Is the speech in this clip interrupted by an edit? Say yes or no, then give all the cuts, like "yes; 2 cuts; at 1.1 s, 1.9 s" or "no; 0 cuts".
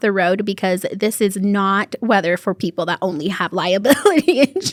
no; 0 cuts